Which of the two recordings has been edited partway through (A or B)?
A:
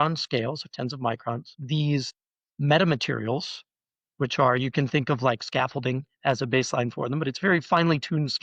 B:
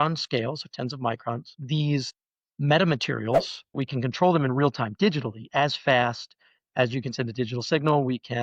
B